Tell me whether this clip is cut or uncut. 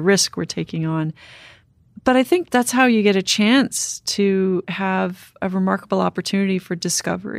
cut